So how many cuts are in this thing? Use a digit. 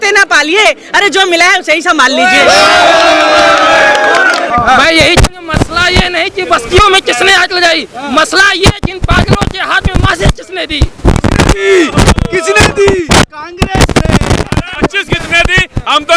0